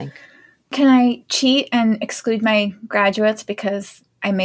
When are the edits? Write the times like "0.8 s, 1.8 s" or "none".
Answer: none